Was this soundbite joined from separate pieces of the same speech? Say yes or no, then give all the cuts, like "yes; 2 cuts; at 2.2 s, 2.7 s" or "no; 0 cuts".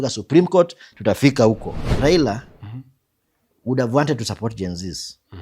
yes; 1 cut; at 1.8 s